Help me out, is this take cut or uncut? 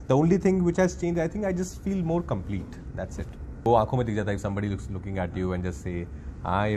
cut